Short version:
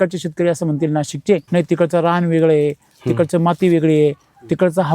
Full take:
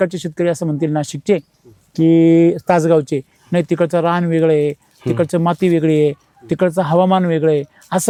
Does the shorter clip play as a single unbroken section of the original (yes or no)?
no